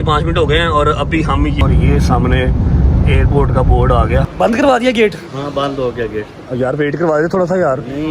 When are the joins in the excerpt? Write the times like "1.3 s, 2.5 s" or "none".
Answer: 1.6 s, 4.4 s